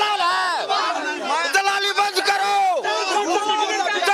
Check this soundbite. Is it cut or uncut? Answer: uncut